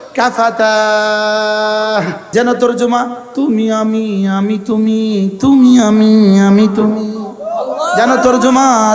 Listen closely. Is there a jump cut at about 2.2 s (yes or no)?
yes